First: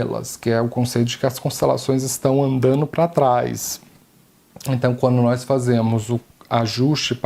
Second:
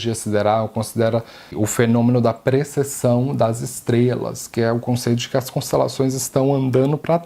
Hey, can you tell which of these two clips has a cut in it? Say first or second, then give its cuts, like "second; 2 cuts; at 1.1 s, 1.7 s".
second; 1 cut; at 1.5 s